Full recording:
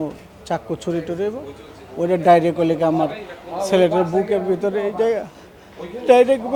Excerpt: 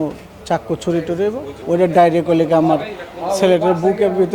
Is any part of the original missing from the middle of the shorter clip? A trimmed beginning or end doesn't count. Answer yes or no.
yes